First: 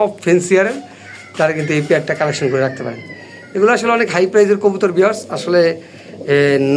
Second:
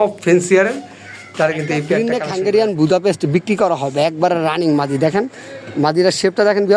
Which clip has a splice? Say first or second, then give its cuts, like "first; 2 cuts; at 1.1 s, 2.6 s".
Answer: second; 1 cut; at 2.0 s